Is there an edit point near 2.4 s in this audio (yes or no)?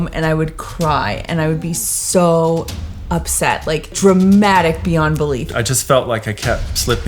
no